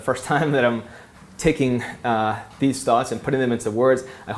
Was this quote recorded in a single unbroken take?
yes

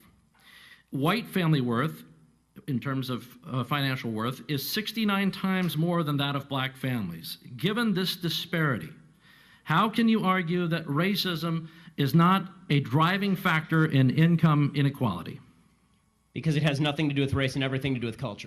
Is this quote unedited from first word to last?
no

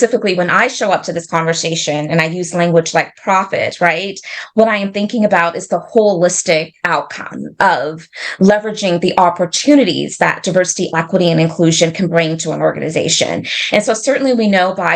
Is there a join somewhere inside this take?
no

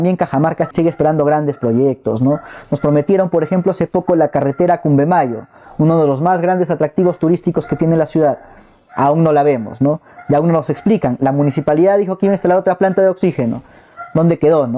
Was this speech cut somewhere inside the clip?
no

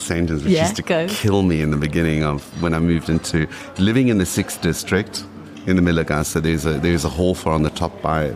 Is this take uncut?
yes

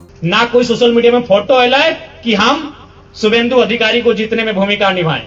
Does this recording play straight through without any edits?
yes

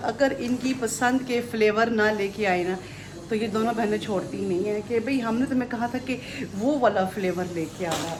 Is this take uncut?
yes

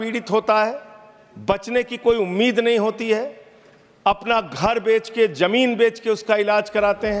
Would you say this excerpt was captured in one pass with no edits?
yes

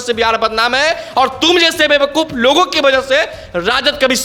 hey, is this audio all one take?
yes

